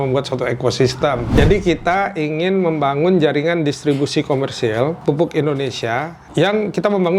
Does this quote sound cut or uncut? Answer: cut